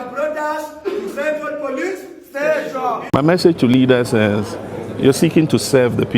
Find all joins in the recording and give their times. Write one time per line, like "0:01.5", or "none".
0:03.0